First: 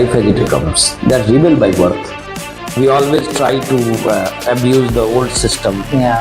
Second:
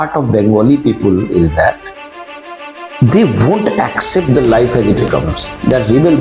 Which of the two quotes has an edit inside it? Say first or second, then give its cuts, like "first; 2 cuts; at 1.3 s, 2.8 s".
first; 1 cut; at 2.6 s